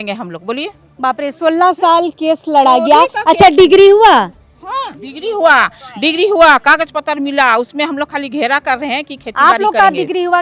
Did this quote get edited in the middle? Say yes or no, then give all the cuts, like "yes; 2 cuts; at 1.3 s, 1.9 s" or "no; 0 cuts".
no; 0 cuts